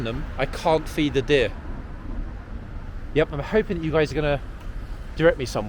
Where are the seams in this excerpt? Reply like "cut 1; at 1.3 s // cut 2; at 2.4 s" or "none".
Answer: none